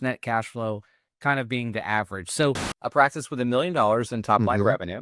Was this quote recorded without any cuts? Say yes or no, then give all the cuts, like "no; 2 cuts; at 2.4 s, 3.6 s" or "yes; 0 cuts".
no; 1 cut; at 2.7 s